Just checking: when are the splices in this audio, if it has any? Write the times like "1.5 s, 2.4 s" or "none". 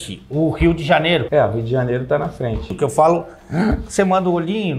1.3 s, 2.7 s